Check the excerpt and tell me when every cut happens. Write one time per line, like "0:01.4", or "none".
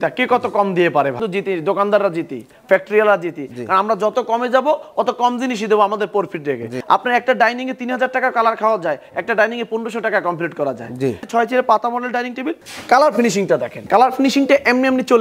0:01.2
0:06.7
0:11.2
0:12.6
0:13.7